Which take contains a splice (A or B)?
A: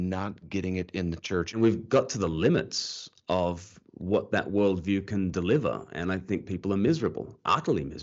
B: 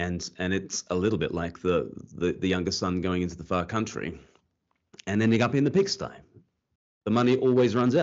A